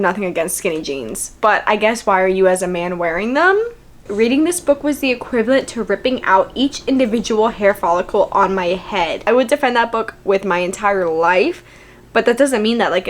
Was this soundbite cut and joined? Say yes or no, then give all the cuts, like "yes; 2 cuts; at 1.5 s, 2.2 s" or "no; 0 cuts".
yes; 2 cuts; at 4.0 s, 9.3 s